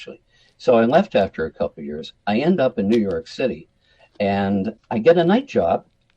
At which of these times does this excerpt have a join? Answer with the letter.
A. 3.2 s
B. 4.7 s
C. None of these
B